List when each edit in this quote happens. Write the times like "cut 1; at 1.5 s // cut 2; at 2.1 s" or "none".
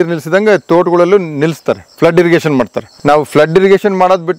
cut 1; at 2.8 s